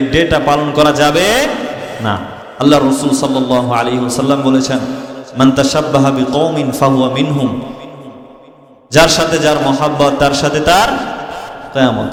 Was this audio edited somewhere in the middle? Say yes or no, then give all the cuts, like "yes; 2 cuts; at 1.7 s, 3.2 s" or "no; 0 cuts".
no; 0 cuts